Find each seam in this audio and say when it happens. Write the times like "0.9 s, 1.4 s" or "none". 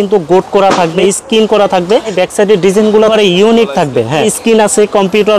1.0 s, 2.1 s, 3.1 s, 4.3 s